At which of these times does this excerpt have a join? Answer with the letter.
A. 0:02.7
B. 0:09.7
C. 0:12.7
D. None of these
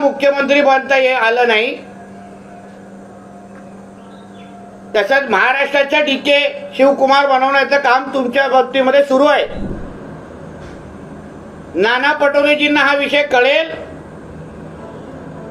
B